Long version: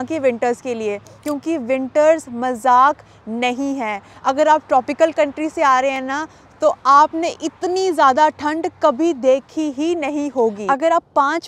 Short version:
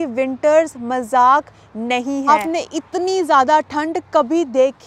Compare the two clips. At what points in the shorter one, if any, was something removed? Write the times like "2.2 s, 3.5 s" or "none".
2.3 s